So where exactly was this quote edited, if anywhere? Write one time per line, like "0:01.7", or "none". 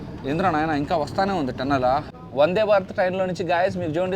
0:02.1